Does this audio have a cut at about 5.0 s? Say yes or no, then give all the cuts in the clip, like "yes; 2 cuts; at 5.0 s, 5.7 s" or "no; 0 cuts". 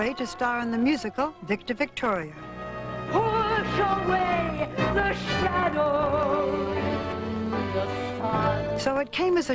no; 1 cut; at 1.8 s